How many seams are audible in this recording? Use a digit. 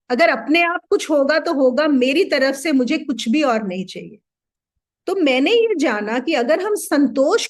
0